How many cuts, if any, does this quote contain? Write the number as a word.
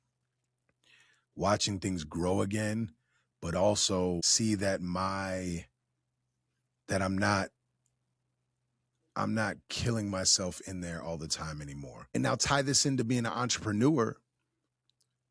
two